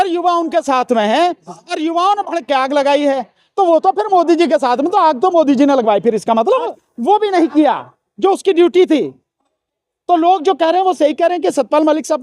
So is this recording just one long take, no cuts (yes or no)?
no